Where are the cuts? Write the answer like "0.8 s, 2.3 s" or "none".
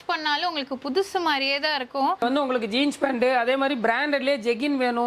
2.2 s